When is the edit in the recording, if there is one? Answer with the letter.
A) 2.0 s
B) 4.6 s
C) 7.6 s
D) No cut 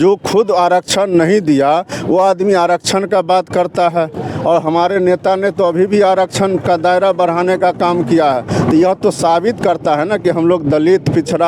D